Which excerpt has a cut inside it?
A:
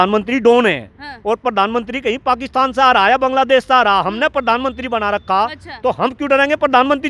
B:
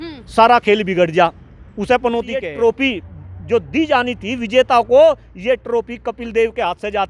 B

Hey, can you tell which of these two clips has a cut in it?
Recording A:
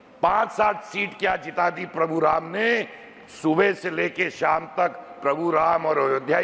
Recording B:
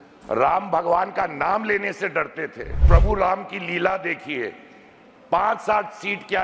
B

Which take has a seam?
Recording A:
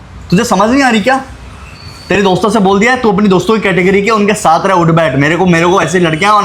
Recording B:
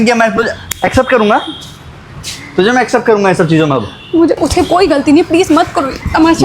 B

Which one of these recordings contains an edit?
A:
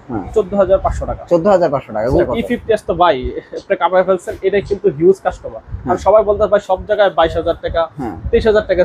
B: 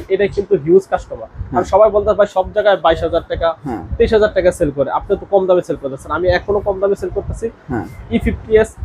A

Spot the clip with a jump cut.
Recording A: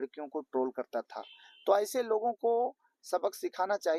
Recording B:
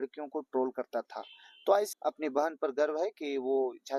B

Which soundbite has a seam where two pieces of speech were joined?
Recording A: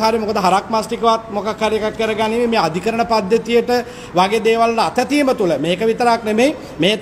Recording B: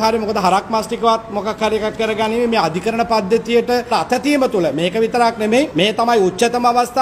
B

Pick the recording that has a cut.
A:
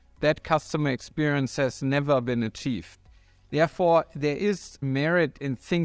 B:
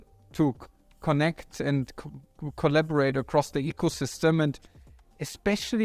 A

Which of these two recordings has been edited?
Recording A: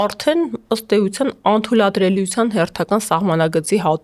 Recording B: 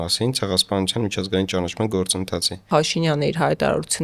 B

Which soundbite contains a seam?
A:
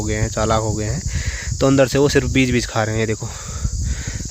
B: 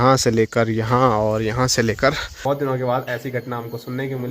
B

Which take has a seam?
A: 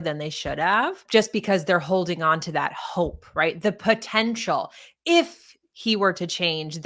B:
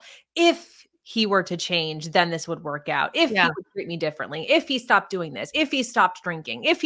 A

